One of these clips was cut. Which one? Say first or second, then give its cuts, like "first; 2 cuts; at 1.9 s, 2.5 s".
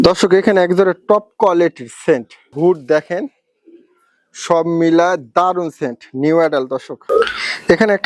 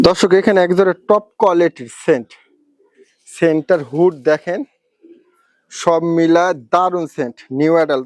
first; 2 cuts; at 2.5 s, 6.9 s